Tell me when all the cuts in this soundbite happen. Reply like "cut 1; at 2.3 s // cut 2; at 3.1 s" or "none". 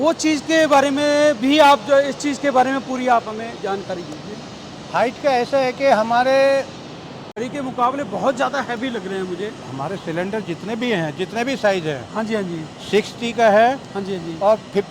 cut 1; at 7.4 s